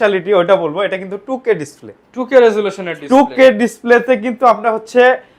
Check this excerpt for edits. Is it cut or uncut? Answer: uncut